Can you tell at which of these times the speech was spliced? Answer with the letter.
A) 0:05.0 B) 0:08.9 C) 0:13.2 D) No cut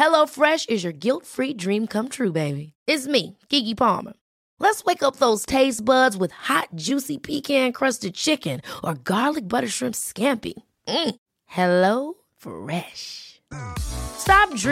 D